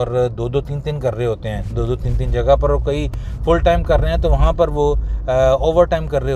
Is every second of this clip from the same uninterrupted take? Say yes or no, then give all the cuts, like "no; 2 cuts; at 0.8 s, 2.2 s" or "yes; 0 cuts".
yes; 0 cuts